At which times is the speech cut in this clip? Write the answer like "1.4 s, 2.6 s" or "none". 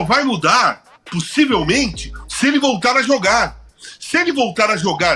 none